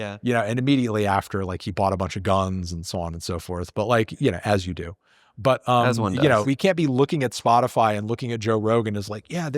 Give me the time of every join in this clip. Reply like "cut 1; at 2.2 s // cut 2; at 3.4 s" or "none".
cut 1; at 6.4 s